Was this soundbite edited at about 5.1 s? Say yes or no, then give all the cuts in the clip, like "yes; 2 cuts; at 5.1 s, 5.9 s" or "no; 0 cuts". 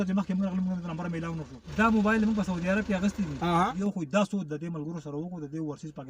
no; 2 cuts; at 1.6 s, 3.7 s